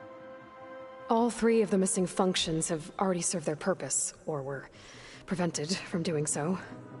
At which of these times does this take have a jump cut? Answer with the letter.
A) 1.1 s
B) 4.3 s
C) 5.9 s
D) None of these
A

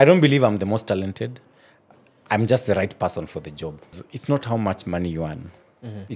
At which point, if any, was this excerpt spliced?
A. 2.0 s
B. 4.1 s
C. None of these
B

